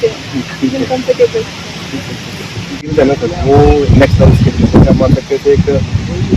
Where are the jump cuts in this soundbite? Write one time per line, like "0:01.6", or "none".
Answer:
0:02.8